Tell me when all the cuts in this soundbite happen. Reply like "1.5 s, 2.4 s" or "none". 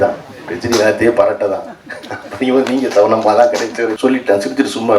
4.0 s